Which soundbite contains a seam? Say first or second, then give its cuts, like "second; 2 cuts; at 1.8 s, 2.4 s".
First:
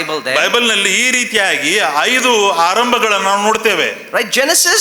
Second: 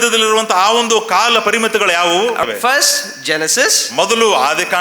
second; 1 cut; at 2.4 s